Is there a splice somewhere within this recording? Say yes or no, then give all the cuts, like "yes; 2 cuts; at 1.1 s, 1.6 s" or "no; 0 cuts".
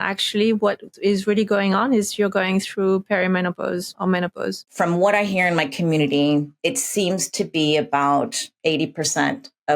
yes; 4 cuts; at 3.9 s, 4.7 s, 6.5 s, 8.5 s